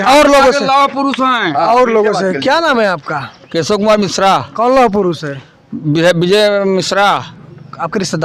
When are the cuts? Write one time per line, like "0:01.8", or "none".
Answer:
none